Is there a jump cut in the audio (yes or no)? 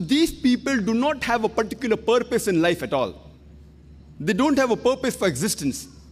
no